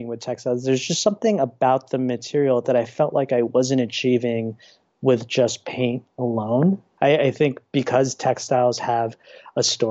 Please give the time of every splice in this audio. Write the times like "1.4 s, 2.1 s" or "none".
6.9 s